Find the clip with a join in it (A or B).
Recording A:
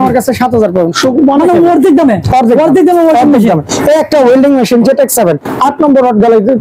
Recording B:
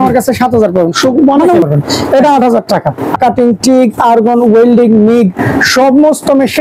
B